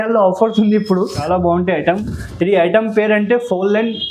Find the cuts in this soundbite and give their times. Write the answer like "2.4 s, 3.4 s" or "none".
1.2 s